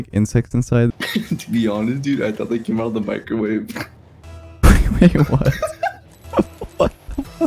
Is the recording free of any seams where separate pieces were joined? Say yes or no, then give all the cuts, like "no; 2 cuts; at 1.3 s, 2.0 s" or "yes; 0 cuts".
no; 1 cut; at 0.9 s